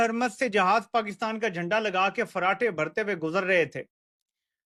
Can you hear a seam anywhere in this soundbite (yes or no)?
no